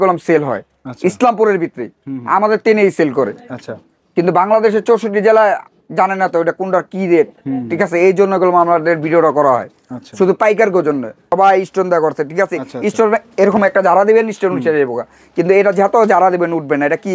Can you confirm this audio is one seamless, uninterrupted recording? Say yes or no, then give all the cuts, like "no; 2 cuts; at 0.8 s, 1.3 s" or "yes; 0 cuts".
no; 1 cut; at 11.3 s